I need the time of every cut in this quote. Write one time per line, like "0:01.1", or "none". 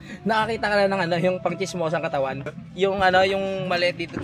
0:02.6